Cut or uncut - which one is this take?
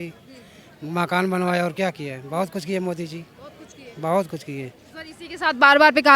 uncut